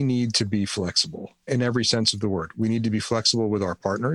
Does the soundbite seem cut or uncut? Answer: cut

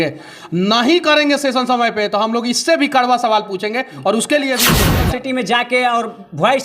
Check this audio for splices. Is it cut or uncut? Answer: cut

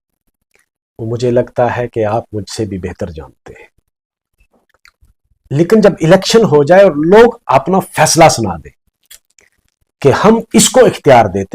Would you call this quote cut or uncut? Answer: cut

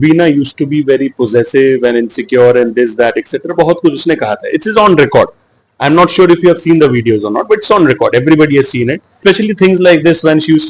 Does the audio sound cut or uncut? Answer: cut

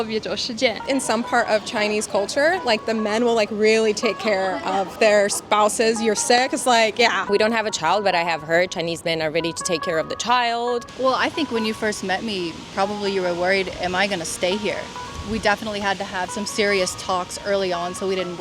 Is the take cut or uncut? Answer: cut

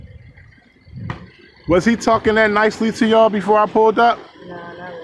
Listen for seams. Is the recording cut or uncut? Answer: uncut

